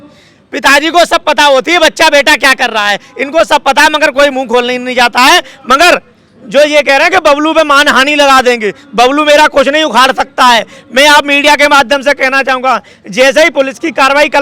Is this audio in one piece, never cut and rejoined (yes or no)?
yes